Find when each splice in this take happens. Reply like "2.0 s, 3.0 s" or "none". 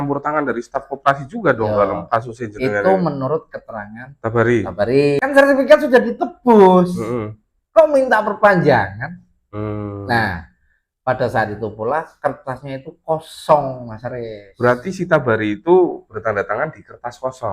5.2 s